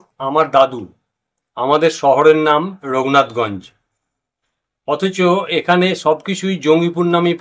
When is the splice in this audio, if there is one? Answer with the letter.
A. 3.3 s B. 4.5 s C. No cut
C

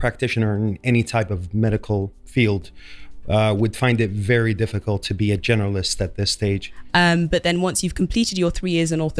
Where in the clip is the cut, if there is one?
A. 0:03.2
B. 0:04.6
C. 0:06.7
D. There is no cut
C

